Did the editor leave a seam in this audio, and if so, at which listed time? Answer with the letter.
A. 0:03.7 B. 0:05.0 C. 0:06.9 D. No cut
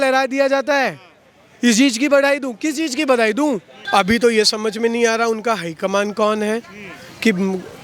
A